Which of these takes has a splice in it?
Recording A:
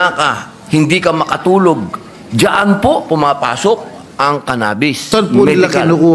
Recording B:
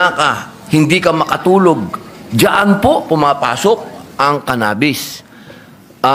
A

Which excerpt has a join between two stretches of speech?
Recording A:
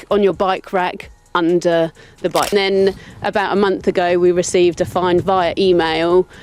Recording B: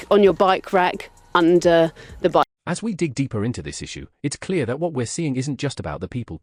A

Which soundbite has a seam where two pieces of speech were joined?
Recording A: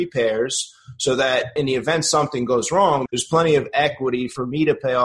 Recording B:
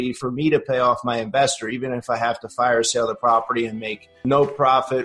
A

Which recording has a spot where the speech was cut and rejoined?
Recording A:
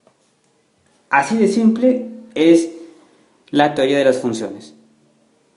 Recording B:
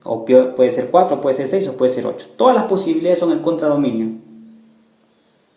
A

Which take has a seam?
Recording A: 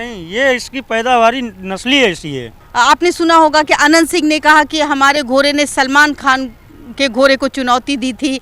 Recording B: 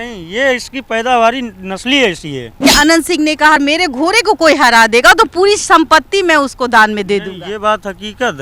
B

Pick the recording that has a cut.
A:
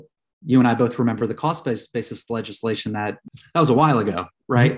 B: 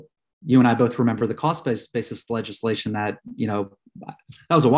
A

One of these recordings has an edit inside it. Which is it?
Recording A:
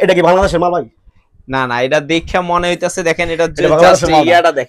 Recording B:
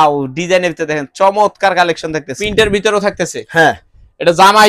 B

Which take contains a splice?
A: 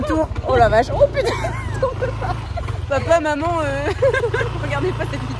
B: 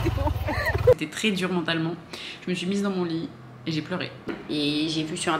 B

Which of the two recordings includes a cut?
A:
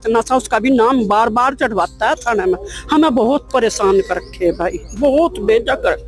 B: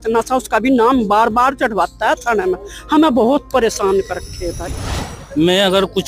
B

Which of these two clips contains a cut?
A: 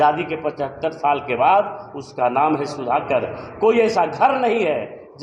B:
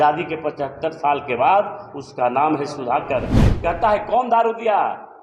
B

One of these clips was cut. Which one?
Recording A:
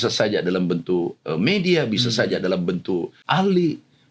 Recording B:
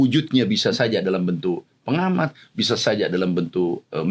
A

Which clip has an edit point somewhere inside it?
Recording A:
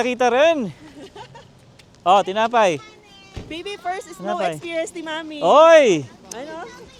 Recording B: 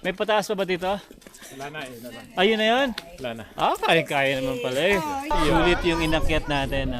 B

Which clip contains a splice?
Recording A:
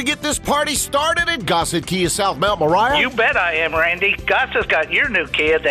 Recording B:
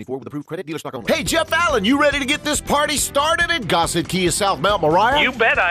B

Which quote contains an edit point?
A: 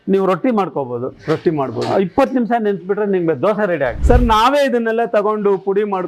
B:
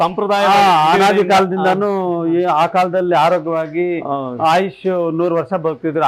A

